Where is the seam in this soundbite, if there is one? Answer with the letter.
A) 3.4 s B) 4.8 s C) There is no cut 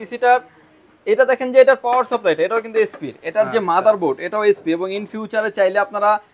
C